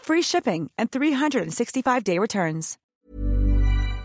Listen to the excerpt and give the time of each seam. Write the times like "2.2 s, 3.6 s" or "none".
2.8 s